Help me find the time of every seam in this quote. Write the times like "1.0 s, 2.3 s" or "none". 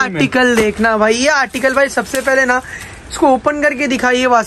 none